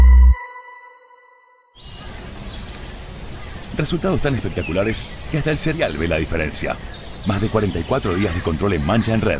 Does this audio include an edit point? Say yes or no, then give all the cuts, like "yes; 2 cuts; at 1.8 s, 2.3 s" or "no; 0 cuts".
yes; 1 cut; at 1.9 s